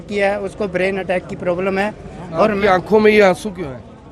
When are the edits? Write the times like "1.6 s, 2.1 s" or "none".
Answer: none